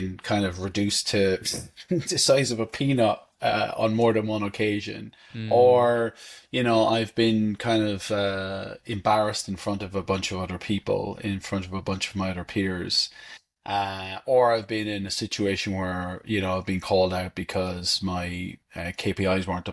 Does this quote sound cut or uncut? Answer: uncut